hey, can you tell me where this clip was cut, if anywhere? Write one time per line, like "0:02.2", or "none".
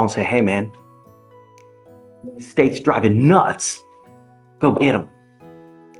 0:05.1